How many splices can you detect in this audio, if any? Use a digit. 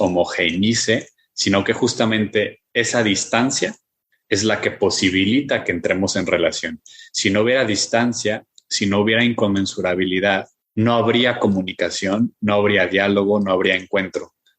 1